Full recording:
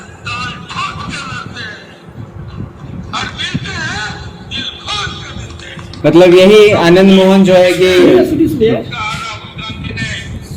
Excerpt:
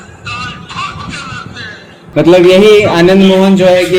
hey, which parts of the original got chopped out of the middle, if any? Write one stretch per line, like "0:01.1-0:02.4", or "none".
0:02.1-0:05.9